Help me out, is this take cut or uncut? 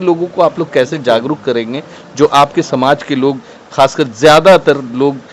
uncut